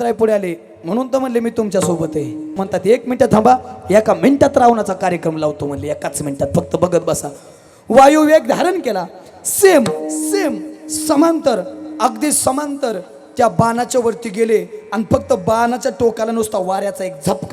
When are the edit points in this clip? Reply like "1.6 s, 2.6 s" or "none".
2.7 s